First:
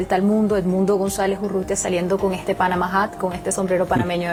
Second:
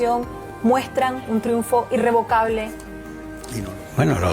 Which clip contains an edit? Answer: second; 1 cut; at 3.3 s

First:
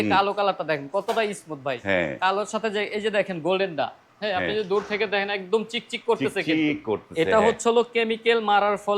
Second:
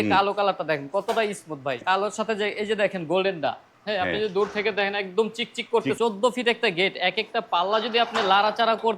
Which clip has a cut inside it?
second; 2 cuts; at 1.8 s, 6.0 s

